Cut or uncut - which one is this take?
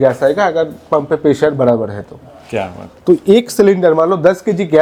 uncut